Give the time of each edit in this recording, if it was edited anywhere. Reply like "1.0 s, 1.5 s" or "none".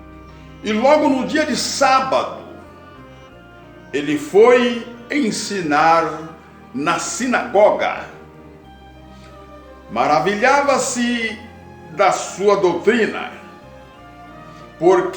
8.4 s, 9.9 s